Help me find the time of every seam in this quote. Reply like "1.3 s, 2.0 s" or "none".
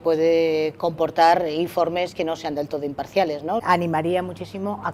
3.6 s